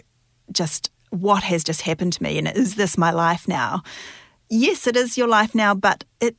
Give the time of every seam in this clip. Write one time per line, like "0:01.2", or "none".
none